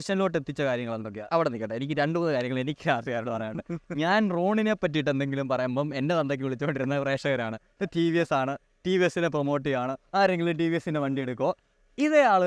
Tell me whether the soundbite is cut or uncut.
cut